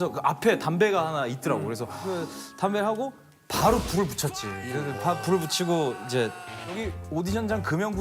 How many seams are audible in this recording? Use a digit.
2